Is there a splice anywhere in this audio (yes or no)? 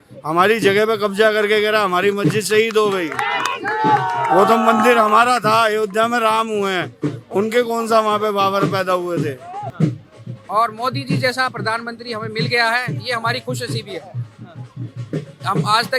yes